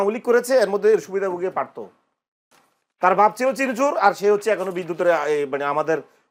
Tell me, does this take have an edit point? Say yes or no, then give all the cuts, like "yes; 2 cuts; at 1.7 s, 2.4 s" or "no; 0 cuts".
no; 0 cuts